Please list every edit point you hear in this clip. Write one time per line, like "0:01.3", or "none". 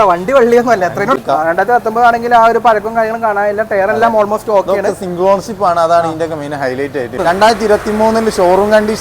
0:01.2
0:07.2

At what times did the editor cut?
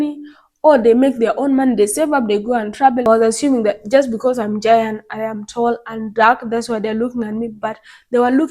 0:03.1

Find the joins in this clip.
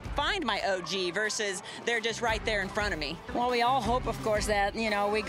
0:03.2

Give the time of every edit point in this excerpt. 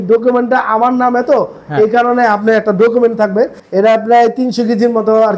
0:03.6

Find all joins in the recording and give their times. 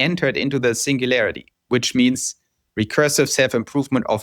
0:01.5

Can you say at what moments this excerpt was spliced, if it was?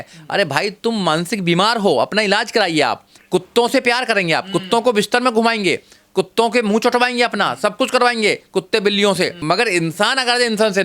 0:03.1
0:09.4

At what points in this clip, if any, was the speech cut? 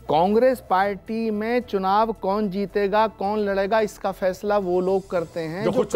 none

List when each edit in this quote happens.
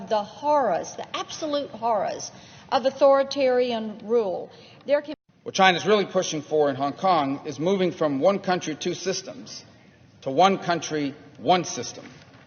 0:05.1

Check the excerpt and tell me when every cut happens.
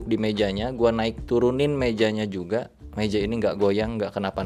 none

